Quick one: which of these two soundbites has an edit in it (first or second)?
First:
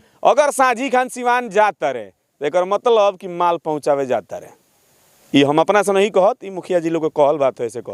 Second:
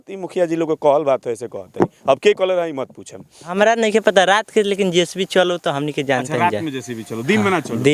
second